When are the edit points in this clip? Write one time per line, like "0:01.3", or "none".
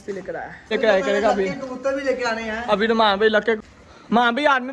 0:00.7
0:03.6